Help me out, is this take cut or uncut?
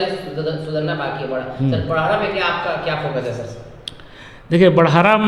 uncut